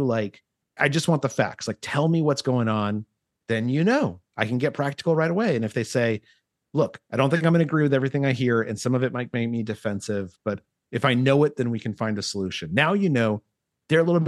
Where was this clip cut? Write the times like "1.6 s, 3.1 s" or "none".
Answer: 7.4 s